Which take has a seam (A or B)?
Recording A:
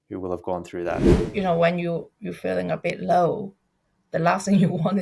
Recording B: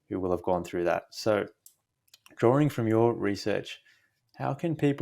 A